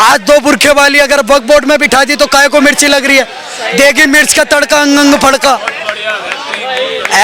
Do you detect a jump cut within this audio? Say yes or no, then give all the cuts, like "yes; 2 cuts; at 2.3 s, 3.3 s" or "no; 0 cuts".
no; 0 cuts